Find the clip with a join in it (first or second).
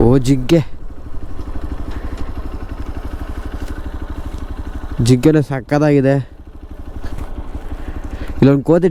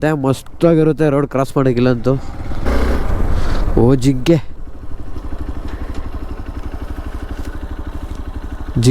second